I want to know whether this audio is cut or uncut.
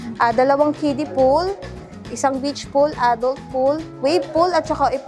uncut